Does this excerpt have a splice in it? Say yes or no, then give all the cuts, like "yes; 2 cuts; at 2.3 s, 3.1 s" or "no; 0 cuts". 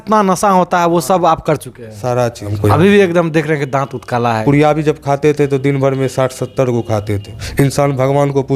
yes; 3 cuts; at 2.5 s, 4.4 s, 7.3 s